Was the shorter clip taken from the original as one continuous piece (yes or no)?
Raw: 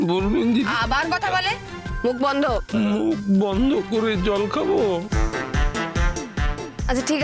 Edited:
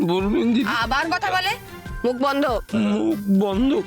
yes